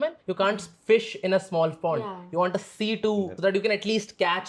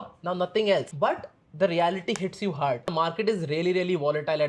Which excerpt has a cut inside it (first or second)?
second